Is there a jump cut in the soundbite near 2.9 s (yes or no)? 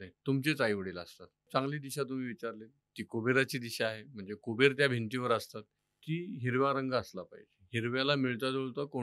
no